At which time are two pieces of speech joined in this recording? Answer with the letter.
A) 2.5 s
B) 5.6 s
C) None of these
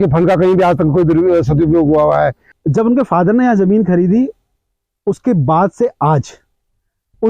A